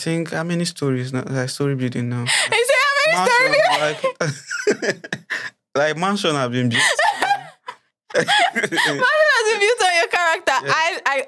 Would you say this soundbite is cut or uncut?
uncut